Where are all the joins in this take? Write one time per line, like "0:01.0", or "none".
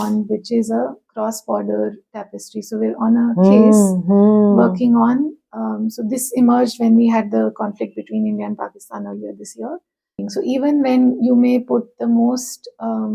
0:10.2